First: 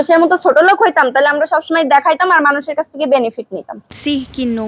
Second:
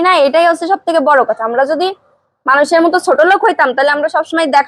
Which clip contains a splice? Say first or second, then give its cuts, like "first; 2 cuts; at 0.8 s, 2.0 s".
first; 1 cut; at 3.8 s